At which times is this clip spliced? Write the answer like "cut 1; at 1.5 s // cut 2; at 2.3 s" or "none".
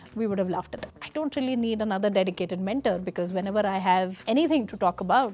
cut 1; at 1.0 s